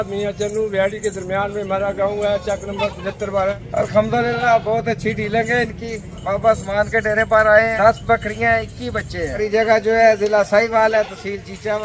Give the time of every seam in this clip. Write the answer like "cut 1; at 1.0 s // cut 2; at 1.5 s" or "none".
cut 1; at 3.5 s // cut 2; at 7.7 s // cut 3; at 9.4 s